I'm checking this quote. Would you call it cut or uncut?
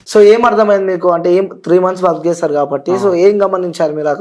uncut